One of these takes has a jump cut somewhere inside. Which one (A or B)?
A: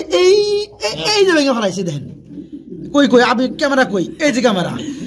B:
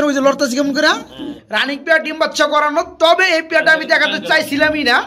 B